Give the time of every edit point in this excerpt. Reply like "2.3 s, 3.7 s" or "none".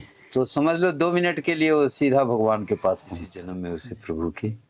3.5 s